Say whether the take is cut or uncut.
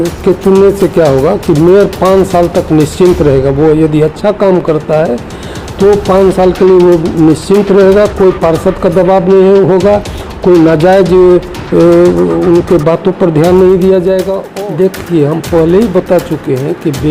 cut